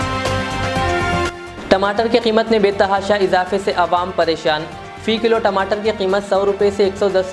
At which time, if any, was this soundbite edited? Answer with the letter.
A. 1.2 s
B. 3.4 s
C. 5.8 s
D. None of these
D